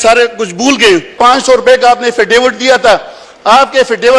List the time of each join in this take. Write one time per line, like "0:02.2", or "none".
0:01.1